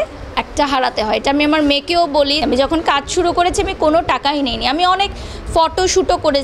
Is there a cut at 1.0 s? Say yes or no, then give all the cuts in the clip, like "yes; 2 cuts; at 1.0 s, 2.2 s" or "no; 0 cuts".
no; 1 cut; at 2.4 s